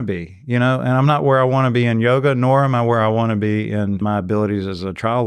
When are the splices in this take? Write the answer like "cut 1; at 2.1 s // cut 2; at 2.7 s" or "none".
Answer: cut 1; at 4.0 s